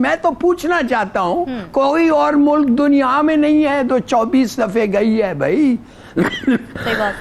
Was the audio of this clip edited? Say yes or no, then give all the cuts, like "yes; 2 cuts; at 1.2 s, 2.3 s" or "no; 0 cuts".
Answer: no; 0 cuts